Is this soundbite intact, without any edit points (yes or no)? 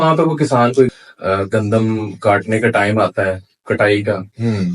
no